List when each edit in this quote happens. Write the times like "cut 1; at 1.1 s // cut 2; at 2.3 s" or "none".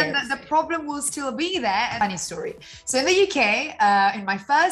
cut 1; at 2.0 s

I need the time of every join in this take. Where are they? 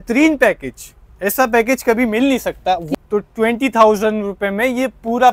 cut 1; at 2.9 s

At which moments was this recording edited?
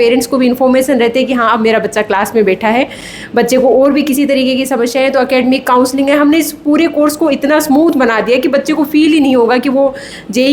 none

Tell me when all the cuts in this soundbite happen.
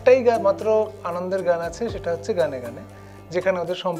none

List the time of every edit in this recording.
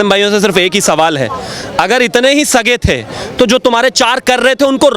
none

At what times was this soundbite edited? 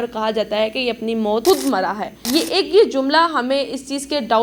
cut 1; at 1.4 s // cut 2; at 2.1 s

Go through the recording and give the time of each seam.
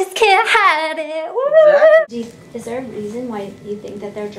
cut 1; at 2.0 s

